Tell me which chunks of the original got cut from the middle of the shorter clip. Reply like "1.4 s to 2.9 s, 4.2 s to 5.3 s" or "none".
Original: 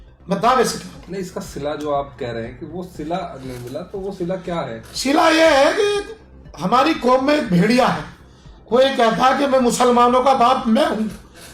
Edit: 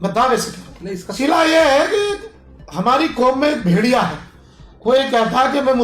1.3 s to 4.9 s